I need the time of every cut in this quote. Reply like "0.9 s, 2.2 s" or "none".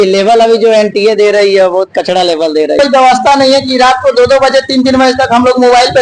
2.8 s